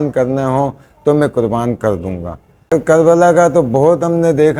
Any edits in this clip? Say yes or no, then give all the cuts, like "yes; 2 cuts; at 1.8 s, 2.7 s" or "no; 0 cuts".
no; 0 cuts